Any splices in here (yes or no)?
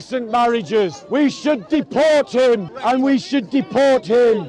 yes